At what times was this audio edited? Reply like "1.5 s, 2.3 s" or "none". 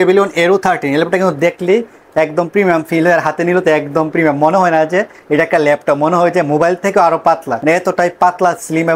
none